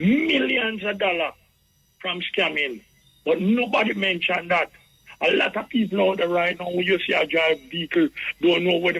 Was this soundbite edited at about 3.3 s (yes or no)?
no